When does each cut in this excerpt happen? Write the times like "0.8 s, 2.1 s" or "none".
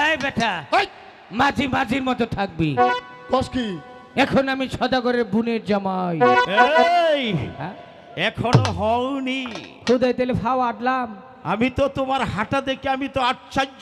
none